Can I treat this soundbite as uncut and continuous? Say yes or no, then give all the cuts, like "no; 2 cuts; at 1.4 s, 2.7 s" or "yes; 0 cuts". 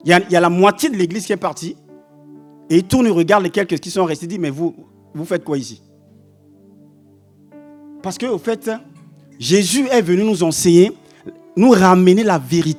yes; 0 cuts